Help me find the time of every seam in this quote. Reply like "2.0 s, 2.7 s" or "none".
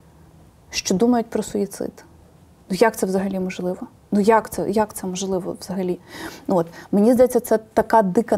none